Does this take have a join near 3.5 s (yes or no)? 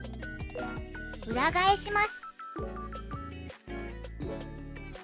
no